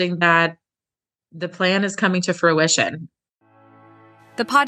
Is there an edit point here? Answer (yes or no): yes